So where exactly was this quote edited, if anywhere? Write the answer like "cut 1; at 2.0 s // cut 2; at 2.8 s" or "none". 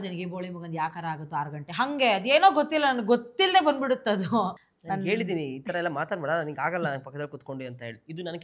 none